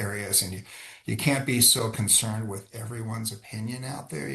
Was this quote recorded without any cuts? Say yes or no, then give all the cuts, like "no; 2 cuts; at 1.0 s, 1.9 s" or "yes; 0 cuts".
yes; 0 cuts